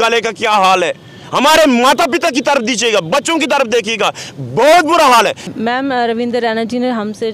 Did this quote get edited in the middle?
yes; 1 cut; at 5.4 s

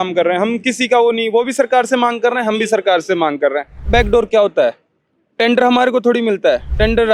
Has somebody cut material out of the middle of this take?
yes; 1 cut; at 3.9 s

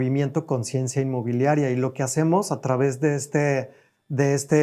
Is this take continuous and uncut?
yes; 0 cuts

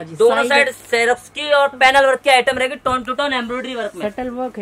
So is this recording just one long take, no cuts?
yes; 0 cuts

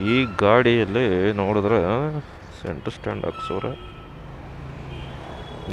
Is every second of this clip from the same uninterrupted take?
yes; 0 cuts

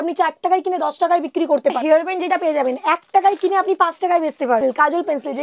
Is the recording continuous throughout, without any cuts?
no; 2 cuts; at 1.8 s, 4.6 s

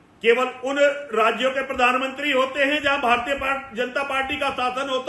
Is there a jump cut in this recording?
no; 0 cuts

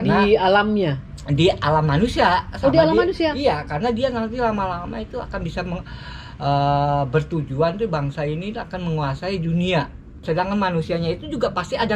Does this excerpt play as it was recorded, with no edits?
no; 1 cut; at 10.2 s

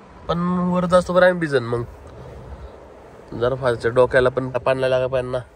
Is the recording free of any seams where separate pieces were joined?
no; 1 cut; at 4.5 s

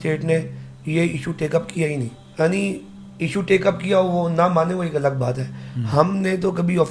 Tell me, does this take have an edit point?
yes; 1 cut; at 2.2 s

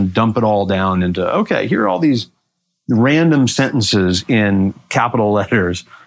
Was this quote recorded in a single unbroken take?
yes; 0 cuts

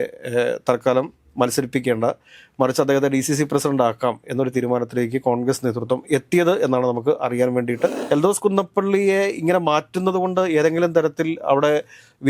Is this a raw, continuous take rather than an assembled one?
no; 1 cut; at 8.0 s

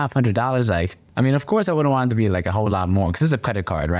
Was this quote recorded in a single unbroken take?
yes; 0 cuts

